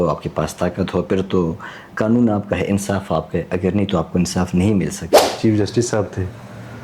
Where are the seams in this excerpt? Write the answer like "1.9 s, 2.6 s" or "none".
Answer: 5.3 s